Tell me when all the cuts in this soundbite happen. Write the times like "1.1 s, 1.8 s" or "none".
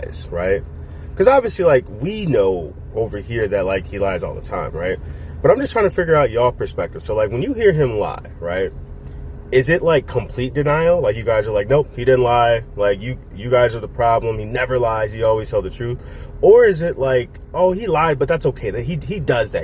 none